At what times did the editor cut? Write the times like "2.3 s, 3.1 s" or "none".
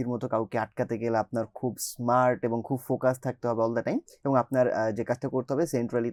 none